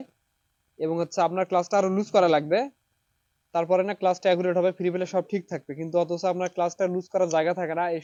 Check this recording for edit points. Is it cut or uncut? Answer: uncut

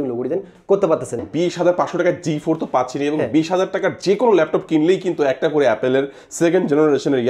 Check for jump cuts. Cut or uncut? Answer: cut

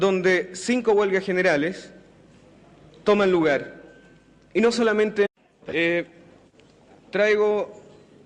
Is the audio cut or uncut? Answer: uncut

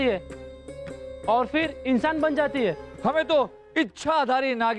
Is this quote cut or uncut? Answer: cut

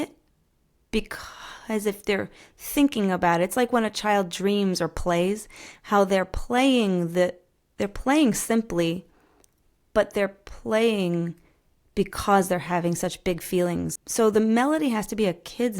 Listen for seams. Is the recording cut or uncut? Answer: cut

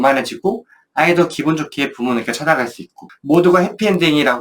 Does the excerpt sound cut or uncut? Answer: cut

